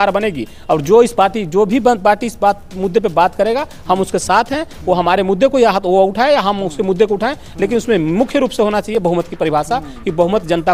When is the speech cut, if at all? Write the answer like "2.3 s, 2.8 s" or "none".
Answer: none